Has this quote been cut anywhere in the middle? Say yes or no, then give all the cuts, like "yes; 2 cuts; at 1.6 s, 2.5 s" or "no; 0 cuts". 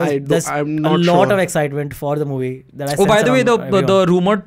no; 0 cuts